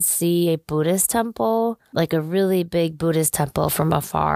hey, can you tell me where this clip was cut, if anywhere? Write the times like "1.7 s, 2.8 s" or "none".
1.8 s

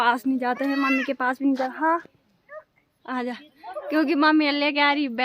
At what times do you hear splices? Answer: none

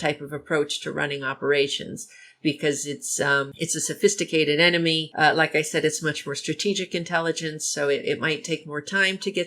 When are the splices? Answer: 3.5 s, 5.1 s

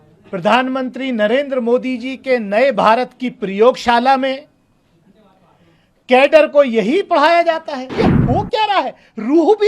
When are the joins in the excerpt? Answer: 7.9 s

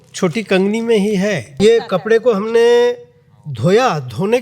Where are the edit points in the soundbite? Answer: 1.5 s

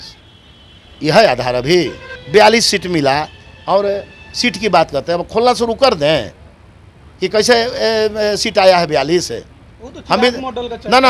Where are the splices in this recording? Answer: 2.1 s

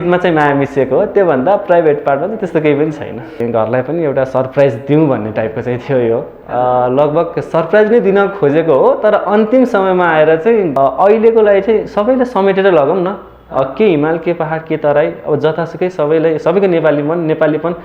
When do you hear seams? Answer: 3.4 s, 10.7 s

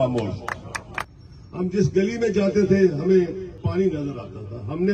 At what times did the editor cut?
1.1 s, 3.5 s

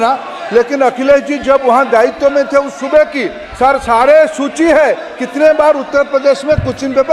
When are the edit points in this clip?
none

